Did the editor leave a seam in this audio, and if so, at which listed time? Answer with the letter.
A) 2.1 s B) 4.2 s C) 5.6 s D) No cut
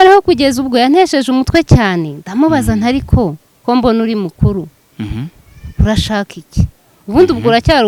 D